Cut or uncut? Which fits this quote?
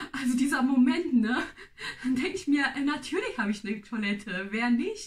uncut